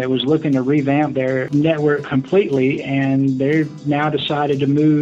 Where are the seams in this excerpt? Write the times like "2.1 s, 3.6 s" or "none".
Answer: 1.5 s